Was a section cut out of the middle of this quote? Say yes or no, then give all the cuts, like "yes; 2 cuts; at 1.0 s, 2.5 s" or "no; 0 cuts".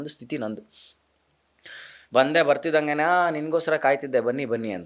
no; 0 cuts